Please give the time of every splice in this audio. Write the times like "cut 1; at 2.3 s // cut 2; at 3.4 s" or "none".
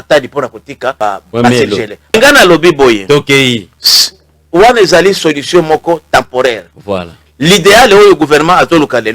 cut 1; at 1.0 s // cut 2; at 2.2 s